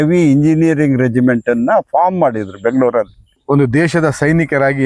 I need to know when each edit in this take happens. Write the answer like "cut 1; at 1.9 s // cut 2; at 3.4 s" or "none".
cut 1; at 3.3 s